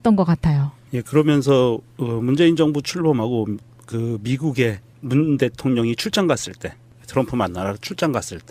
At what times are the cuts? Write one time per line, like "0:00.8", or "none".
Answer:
none